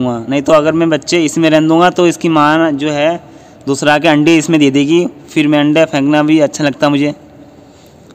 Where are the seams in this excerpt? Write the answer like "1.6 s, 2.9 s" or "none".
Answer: none